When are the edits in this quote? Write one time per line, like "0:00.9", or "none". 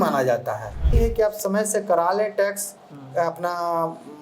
0:00.9